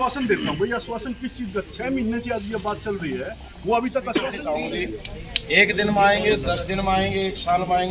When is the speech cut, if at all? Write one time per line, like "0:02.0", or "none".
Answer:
0:04.4